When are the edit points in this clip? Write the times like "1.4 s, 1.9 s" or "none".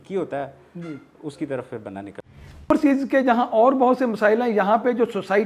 2.7 s